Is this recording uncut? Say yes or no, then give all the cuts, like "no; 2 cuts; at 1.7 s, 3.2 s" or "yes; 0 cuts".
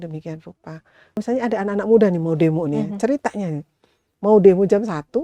no; 1 cut; at 1.2 s